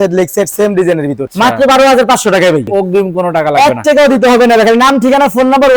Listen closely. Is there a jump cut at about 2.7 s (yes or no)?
yes